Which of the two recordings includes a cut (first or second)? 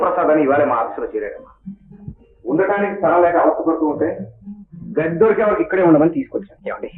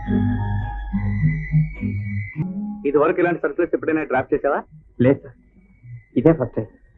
second